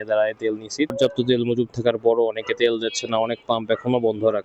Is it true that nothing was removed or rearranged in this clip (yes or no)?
no